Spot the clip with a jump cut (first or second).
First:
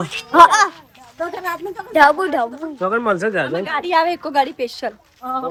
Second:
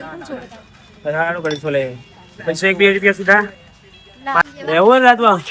second